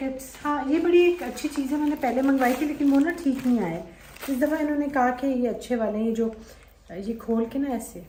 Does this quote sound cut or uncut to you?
uncut